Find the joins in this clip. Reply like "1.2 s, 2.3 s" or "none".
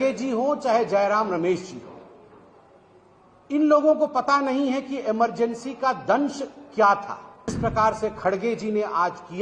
7.5 s

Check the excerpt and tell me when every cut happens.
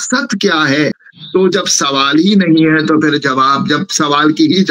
1.0 s

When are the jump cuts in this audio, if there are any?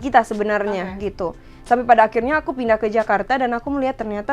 none

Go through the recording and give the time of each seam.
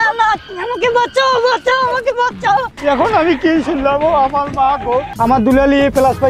2.7 s, 5.1 s

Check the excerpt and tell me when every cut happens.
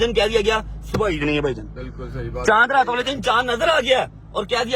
none

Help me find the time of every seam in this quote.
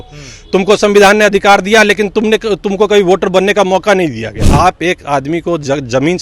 4.4 s

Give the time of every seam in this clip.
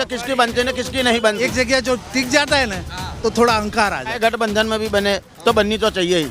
1.5 s, 4.2 s

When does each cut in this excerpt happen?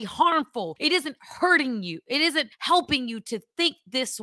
none

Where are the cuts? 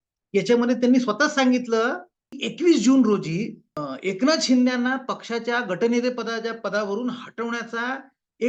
2.4 s

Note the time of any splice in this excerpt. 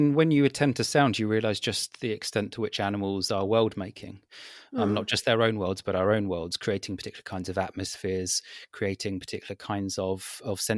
none

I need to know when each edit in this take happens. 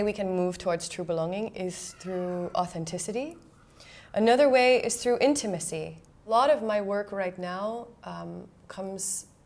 6.3 s

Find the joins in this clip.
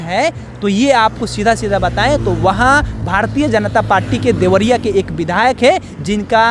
none

